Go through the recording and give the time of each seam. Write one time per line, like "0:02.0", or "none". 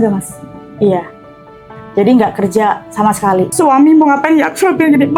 0:03.5